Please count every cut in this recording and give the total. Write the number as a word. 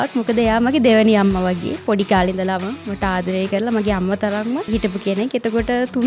one